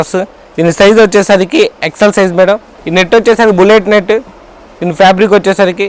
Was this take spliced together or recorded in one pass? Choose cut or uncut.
cut